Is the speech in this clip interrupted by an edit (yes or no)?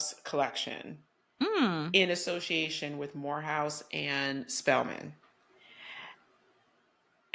no